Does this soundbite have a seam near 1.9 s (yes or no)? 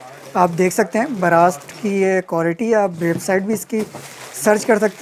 no